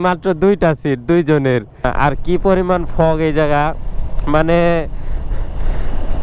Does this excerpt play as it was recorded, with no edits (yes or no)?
no